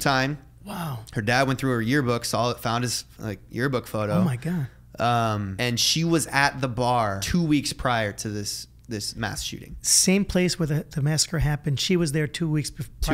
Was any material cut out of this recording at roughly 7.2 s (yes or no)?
yes